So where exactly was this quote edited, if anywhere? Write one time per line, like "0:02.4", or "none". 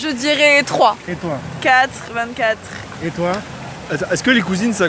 0:01.1